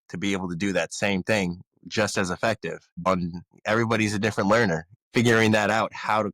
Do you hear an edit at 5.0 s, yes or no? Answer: yes